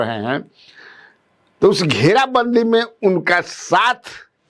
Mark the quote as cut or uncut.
uncut